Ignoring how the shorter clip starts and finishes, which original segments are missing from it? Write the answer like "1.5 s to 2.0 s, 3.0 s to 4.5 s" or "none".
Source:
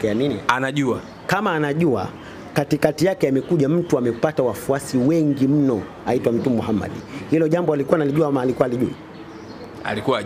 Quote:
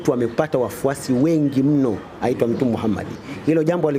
none

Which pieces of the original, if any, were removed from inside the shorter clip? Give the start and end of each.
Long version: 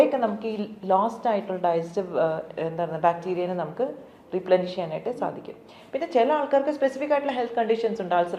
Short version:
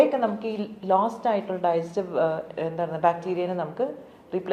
none

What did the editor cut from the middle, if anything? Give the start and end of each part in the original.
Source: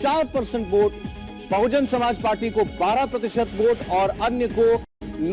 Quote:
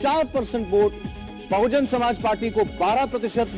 none

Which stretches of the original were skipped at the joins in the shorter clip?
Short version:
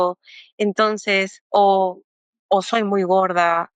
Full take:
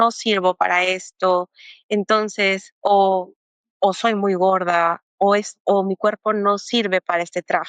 none

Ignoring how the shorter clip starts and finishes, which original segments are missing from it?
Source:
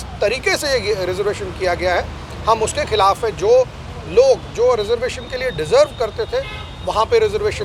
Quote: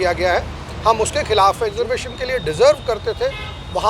3.3 s to 4.8 s

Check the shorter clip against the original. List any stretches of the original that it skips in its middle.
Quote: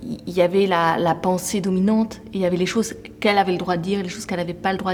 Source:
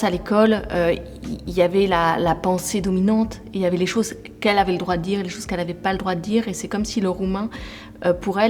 none

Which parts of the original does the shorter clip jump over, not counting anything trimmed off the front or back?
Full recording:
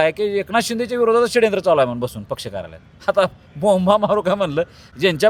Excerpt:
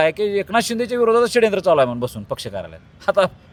none

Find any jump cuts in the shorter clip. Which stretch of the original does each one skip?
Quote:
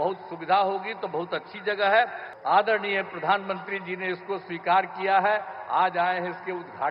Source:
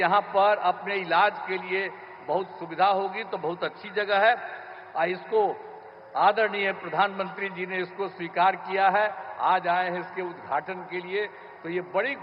4.6 s to 6.0 s

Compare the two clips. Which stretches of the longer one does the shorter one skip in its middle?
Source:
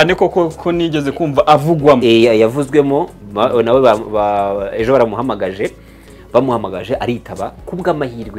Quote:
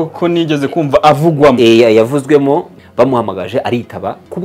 3.2 s to 6.1 s

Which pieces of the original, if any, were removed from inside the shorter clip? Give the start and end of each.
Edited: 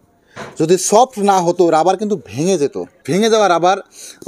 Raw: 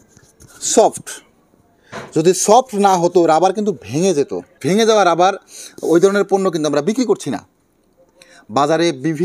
none

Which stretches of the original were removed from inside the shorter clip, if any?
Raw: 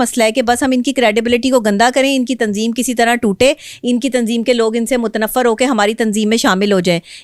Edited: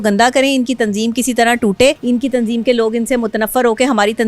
3.6 s to 3.8 s

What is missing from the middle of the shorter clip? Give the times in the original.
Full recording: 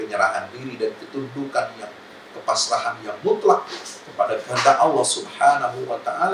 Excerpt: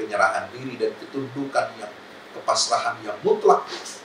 none

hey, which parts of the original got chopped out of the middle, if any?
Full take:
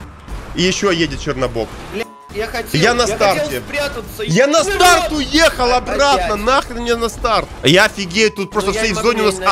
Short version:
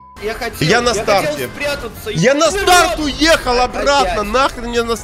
none

